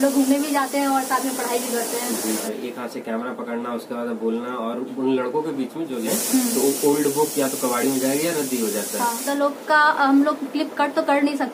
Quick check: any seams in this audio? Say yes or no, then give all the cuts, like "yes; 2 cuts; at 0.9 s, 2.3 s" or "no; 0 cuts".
yes; 3 cuts; at 2.4 s, 6.0 s, 9.3 s